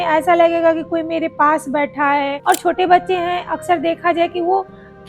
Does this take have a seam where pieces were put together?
yes; 1 cut; at 2.3 s

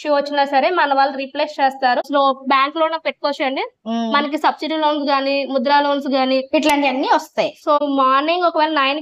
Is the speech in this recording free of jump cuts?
no; 2 cuts; at 2.0 s, 7.8 s

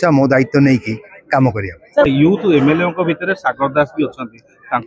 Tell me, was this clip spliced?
yes; 1 cut; at 2.1 s

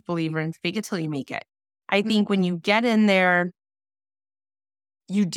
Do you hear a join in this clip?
no; 0 cuts

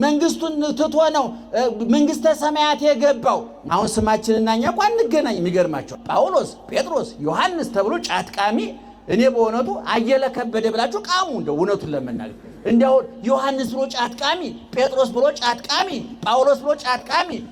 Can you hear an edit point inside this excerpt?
yes; 2 cuts; at 3.5 s, 6.0 s

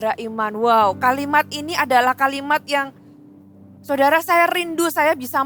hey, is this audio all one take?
yes; 0 cuts

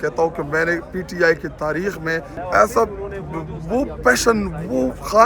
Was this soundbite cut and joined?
yes; 1 cut; at 2.3 s

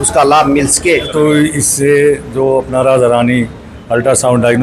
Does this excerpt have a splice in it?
yes; 1 cut; at 1.1 s

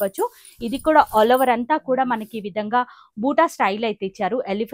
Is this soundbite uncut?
yes; 0 cuts

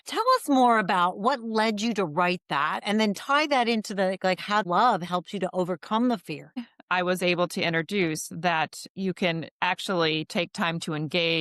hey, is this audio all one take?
no; 3 cuts; at 2.8 s, 4.6 s, 6.7 s

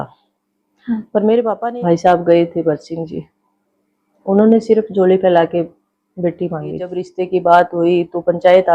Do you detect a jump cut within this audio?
yes; 2 cuts; at 1.6 s, 7.0 s

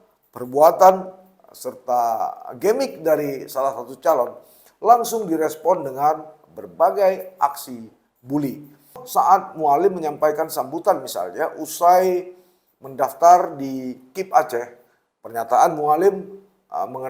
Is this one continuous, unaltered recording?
no; 1 cut; at 9.0 s

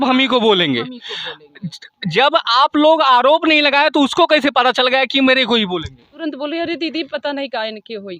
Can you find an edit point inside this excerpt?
yes; 1 cut; at 6.1 s

